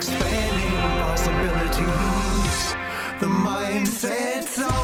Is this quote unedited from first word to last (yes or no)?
yes